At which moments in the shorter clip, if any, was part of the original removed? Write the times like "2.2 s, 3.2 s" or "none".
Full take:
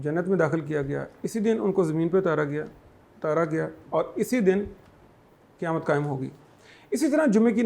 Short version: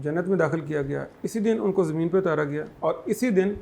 2.7 s